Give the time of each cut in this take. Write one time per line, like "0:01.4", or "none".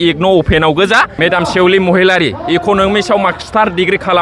0:01.1

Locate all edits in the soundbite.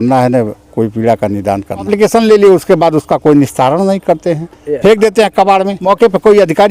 0:01.9
0:05.7

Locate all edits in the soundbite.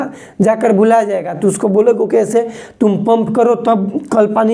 none

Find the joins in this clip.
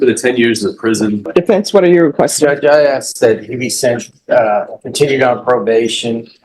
0:01.3

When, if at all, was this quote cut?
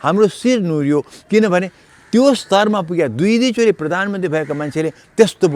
none

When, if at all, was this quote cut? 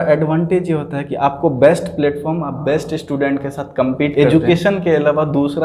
0:04.1

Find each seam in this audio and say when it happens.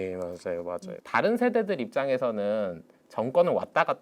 0:01.0

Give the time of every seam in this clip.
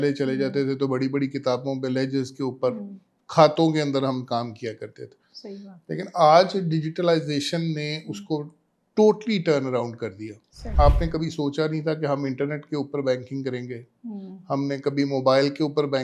0:10.6

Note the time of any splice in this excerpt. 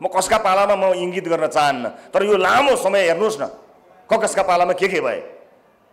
none

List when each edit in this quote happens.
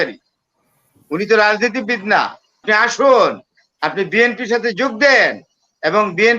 0:02.5

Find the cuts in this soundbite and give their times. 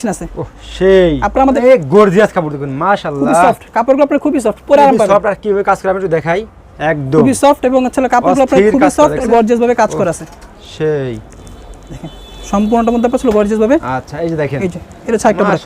0:01.6
0:09.2
0:14.0

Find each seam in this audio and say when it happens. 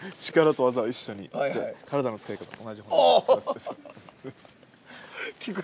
0:04.6

